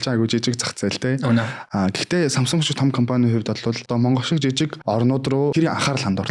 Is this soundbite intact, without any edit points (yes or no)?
no